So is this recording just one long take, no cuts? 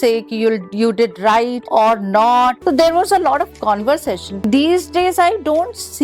no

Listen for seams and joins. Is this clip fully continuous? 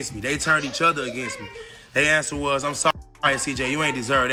yes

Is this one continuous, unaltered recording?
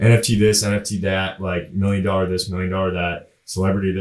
yes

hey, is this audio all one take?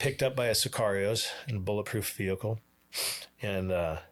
yes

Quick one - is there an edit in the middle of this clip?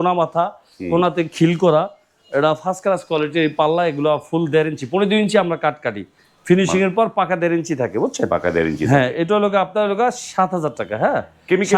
no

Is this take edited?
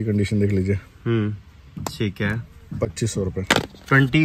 no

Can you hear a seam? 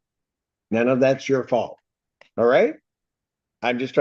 no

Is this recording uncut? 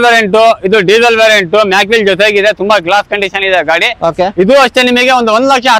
yes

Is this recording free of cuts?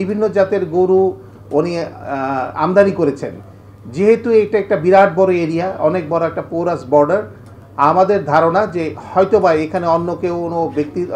yes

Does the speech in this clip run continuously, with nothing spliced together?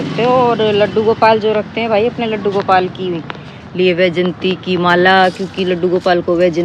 yes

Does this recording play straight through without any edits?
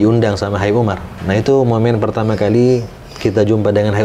no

